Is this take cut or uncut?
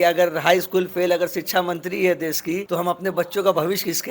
cut